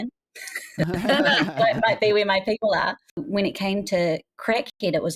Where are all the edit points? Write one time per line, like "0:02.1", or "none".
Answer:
0:01.5
0:03.2